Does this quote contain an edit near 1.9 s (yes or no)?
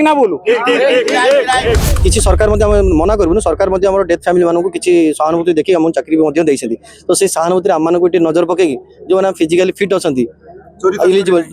yes